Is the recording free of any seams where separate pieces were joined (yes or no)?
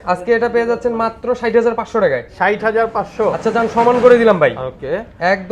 yes